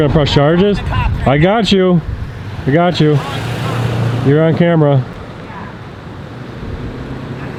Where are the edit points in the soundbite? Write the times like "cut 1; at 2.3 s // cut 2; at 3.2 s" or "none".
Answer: none